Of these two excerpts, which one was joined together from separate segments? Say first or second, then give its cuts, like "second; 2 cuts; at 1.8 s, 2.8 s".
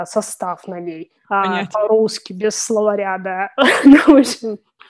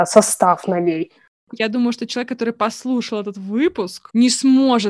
second; 1 cut; at 1.2 s